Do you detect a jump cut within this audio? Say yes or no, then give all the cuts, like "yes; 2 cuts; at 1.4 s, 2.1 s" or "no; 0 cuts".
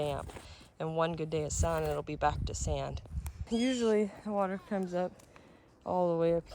yes; 1 cut; at 3.4 s